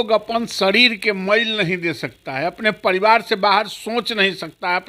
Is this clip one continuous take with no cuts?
yes; 0 cuts

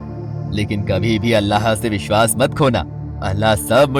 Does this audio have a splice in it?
no; 0 cuts

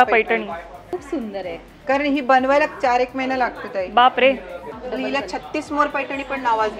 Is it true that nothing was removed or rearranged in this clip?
no; 2 cuts; at 0.9 s, 4.7 s

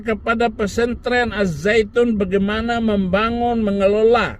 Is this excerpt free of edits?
yes; 0 cuts

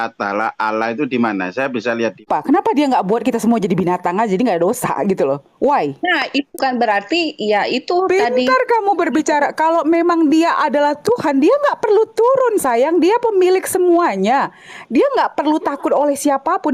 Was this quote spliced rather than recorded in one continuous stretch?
yes; 2 cuts; at 2.2 s, 6.6 s

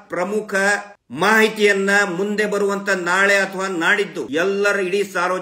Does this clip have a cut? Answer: yes; 2 cuts; at 1.0 s, 4.2 s

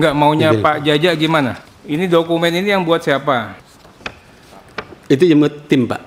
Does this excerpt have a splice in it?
yes; 2 cuts; at 1.7 s, 3.7 s

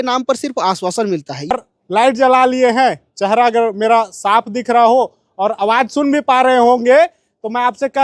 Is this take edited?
yes; 1 cut; at 1.5 s

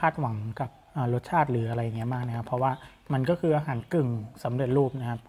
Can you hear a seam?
no; 0 cuts

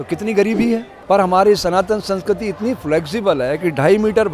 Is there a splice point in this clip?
yes; 1 cut; at 0.9 s

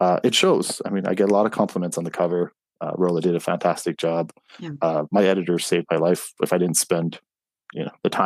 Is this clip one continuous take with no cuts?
yes; 0 cuts

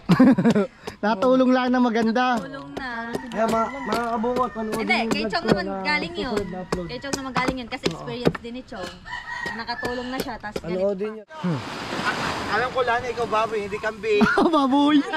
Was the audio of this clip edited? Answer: yes; 1 cut; at 11.1 s

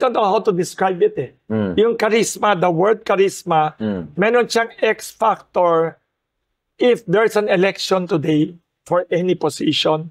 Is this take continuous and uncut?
yes; 0 cuts

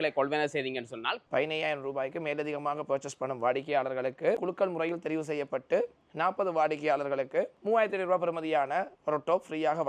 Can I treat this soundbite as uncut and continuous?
no; 3 cuts; at 1.2 s, 4.4 s, 7.6 s

